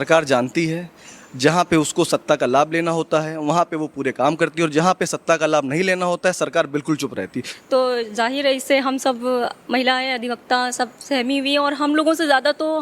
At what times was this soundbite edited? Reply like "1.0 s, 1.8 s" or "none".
7.4 s